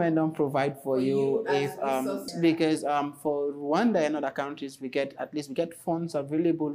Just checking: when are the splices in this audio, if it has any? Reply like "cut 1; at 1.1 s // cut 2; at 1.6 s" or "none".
cut 1; at 2.3 s